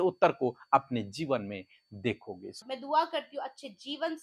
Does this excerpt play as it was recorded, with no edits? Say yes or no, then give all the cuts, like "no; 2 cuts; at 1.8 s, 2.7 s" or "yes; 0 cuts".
no; 1 cut; at 2.6 s